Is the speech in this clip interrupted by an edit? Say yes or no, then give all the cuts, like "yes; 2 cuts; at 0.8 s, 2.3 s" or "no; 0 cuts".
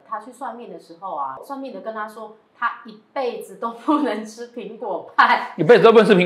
yes; 1 cut; at 1.4 s